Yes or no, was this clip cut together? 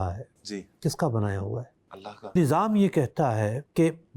yes